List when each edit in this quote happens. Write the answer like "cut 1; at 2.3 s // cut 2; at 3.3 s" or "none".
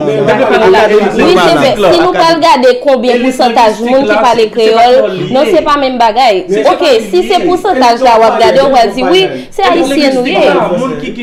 none